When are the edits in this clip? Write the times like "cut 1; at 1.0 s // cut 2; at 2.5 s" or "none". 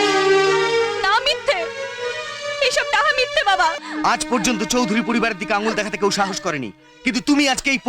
cut 1; at 3.8 s